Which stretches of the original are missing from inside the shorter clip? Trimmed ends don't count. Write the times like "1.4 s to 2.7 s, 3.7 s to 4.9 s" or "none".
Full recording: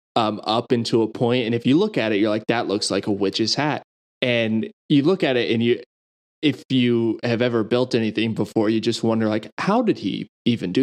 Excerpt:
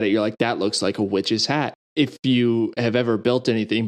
3.9 s to 6.3 s

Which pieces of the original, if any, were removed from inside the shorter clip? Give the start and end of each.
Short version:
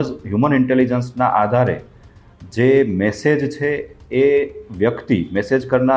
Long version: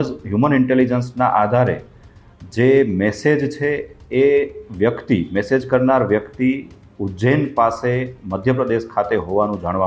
none

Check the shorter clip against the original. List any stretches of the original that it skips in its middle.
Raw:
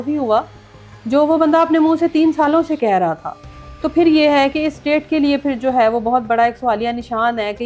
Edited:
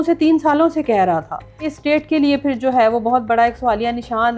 3.6 s to 4.7 s

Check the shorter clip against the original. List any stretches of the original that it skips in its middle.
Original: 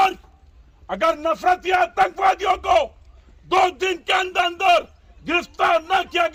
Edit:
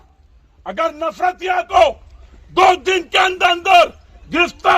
1.9 s to 2.6 s

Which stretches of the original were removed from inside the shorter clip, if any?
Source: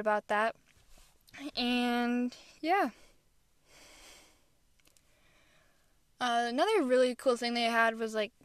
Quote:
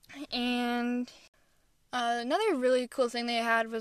2.5 s to 5.5 s

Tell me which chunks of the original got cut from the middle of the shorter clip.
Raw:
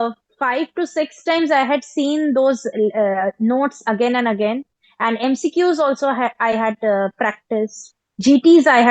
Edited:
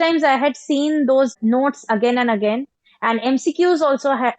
2.6 s to 3.3 s

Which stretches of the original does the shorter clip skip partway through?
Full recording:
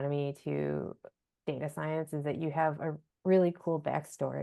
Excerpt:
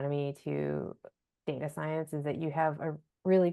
none

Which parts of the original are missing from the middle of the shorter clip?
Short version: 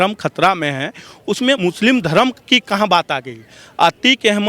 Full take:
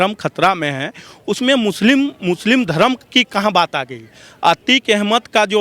1.6 s to 2.2 s

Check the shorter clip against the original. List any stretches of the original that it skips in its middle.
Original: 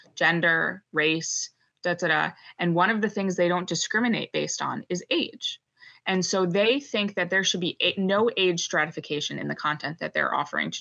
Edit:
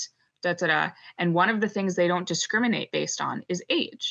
none

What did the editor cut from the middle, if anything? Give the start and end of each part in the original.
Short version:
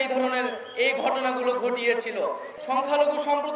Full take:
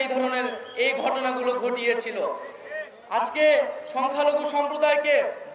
2.5 s to 3.8 s

